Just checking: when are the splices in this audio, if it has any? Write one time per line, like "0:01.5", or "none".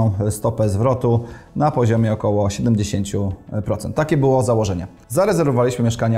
none